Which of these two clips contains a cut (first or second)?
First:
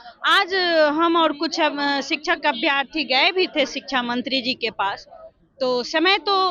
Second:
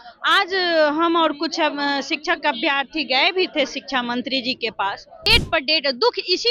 second